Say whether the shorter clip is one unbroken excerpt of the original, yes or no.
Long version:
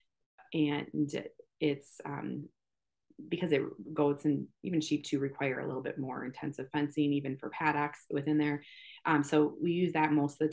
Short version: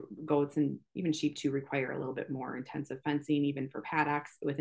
yes